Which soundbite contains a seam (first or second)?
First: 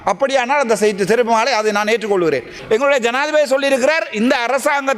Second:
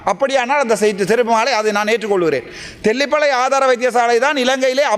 first